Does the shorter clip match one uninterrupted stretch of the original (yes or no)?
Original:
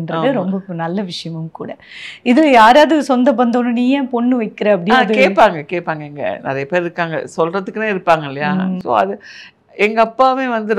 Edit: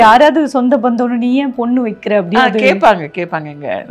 yes